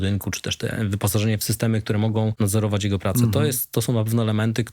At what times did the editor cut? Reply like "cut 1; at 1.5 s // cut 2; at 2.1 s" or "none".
cut 1; at 2.3 s